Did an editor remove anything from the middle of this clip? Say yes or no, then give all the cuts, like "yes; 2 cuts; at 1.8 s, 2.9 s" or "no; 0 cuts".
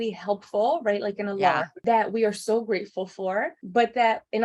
yes; 2 cuts; at 1.7 s, 3.6 s